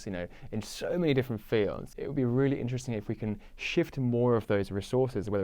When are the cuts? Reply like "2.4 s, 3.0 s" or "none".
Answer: 1.9 s